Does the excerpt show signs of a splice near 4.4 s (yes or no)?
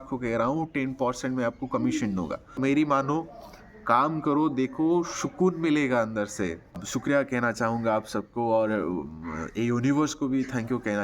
no